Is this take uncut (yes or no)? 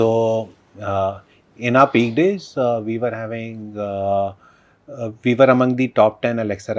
yes